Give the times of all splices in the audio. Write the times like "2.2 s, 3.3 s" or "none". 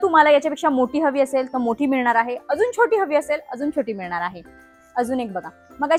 none